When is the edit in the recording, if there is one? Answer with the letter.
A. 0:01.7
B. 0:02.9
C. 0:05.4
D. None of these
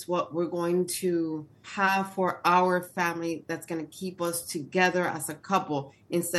A